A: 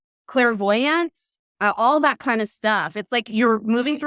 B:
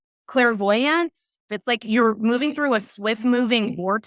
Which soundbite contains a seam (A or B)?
B